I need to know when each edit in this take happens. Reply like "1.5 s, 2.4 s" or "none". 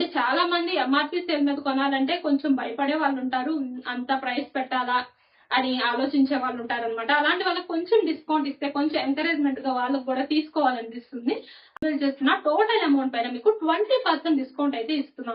11.7 s